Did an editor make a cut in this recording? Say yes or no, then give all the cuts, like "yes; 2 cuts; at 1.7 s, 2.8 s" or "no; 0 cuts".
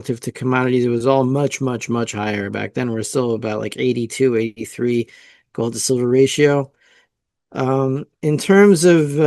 no; 0 cuts